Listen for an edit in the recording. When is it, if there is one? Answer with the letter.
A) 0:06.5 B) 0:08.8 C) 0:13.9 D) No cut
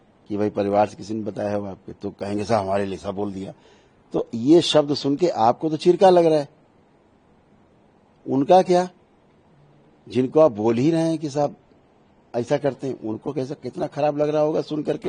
D